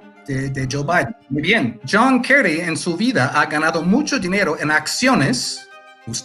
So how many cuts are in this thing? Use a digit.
1